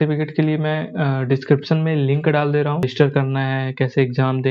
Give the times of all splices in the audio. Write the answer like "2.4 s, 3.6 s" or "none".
2.9 s